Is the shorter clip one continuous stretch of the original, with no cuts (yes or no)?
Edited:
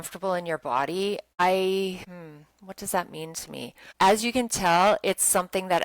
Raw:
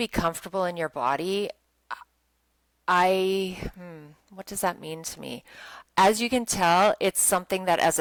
no